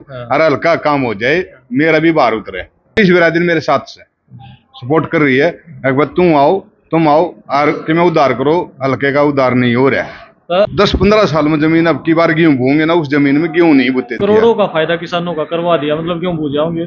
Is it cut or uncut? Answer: cut